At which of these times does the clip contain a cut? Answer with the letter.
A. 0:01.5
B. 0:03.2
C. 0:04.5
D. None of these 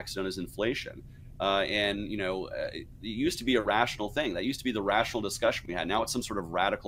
B